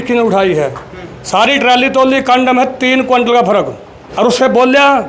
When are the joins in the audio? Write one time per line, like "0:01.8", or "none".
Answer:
0:04.0